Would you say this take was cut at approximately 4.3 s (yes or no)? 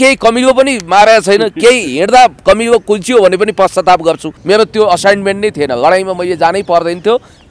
yes